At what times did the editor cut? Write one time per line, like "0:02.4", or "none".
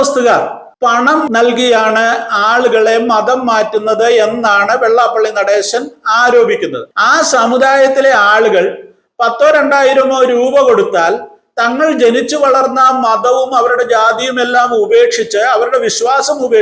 0:01.1
0:06.9